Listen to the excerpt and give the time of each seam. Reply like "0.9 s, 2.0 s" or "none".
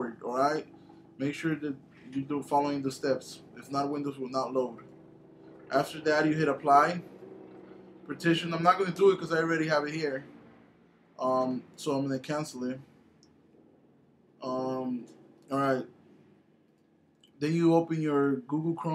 4.0 s